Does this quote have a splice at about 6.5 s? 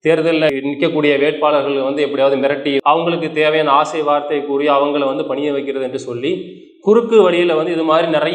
no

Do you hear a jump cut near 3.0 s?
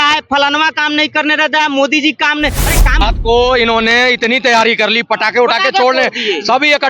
yes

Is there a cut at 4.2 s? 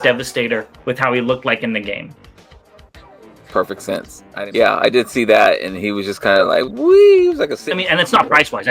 yes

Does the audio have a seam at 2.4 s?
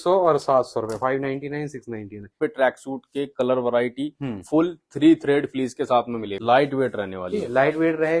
yes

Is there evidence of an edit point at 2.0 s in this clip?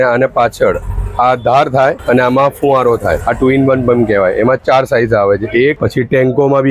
yes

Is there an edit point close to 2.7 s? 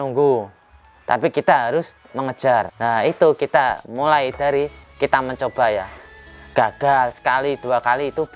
yes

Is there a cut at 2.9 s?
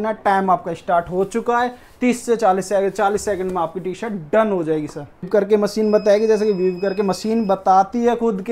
no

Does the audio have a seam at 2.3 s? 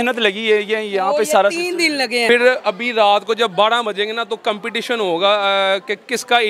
yes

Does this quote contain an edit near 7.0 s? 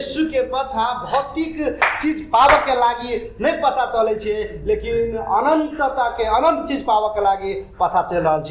no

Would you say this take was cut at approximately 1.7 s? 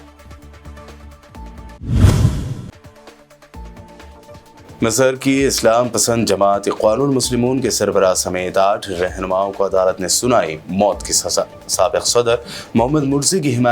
yes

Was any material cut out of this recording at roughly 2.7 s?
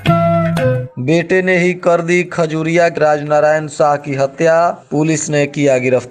no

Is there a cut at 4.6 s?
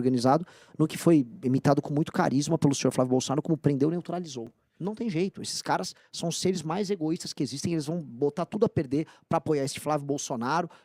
yes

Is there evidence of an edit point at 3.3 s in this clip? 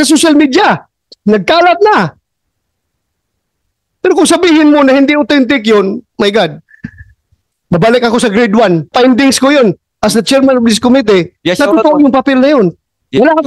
no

